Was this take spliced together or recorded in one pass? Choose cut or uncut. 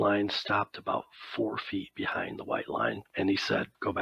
cut